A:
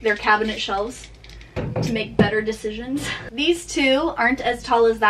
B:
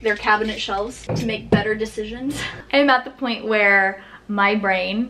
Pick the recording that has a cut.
B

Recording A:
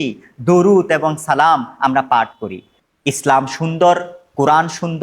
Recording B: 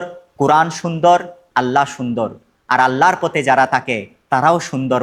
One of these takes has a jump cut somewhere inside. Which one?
A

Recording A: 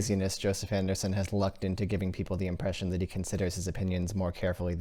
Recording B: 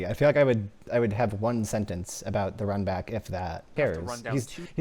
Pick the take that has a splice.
B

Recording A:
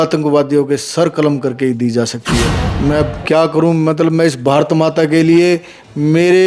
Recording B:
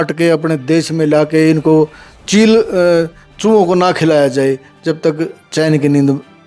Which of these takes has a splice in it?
A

